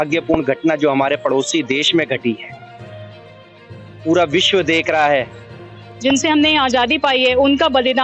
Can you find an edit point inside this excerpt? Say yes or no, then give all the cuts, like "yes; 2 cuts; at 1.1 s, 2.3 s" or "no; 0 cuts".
yes; 1 cut; at 5.7 s